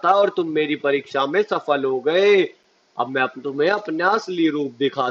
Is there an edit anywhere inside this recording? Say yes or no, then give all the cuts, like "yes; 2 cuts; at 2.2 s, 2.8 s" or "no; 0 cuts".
no; 0 cuts